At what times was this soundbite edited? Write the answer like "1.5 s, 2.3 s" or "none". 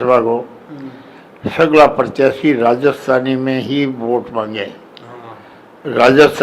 none